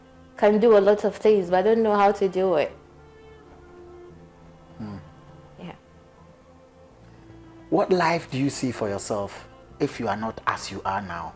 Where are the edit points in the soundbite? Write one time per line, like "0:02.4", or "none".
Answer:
none